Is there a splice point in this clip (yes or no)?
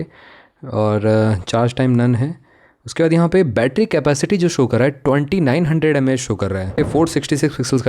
yes